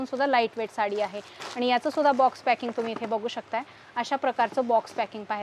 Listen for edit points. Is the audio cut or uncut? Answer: uncut